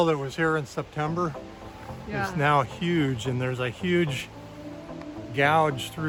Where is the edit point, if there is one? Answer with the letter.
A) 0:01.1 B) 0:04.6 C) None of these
C